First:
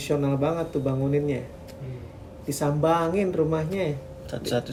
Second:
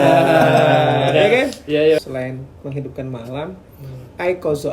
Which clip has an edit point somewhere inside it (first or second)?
second